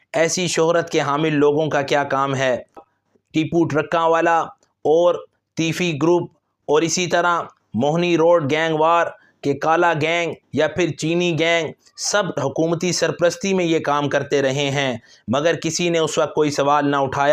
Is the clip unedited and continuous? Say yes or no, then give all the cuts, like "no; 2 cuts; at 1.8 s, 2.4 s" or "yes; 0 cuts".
no; 1 cut; at 2.9 s